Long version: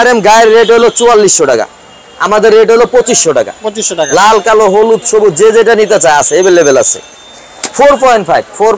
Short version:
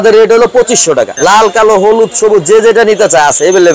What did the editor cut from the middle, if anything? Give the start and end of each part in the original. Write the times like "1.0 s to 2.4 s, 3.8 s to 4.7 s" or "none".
3.5 s to 4.0 s